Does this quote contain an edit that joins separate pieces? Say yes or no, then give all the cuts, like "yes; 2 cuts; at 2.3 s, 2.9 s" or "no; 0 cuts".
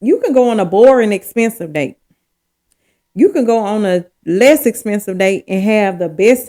no; 0 cuts